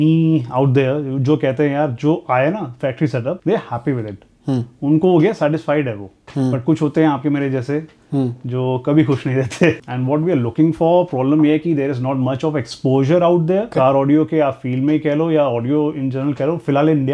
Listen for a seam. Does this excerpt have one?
yes; 3 cuts; at 3.4 s, 9.8 s, 13.7 s

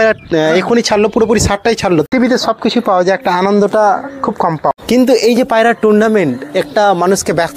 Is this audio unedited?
no; 2 cuts; at 2.1 s, 4.7 s

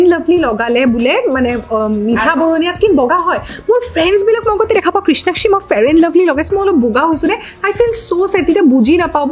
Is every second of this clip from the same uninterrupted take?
yes; 0 cuts

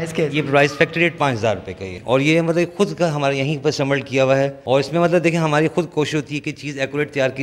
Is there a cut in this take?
yes; 2 cuts; at 1.9 s, 4.6 s

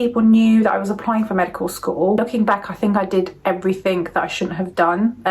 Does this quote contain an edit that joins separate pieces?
yes; 1 cut; at 2.2 s

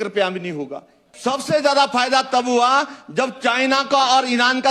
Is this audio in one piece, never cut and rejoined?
no; 1 cut; at 1.0 s

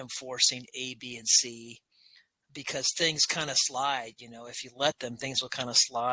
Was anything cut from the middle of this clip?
yes; 1 cut; at 2.4 s

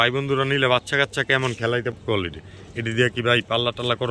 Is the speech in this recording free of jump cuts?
no; 1 cut; at 1.9 s

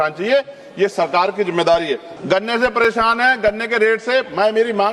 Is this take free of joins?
no; 1 cut; at 2.1 s

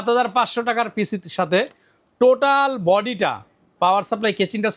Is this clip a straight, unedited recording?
yes; 0 cuts

